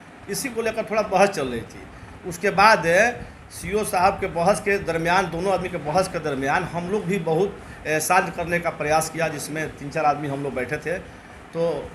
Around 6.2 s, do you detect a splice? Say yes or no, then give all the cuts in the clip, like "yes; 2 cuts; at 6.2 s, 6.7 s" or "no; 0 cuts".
no; 0 cuts